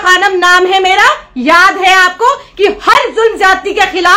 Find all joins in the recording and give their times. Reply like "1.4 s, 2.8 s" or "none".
none